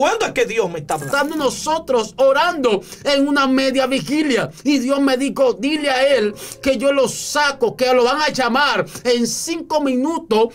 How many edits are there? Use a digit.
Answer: 1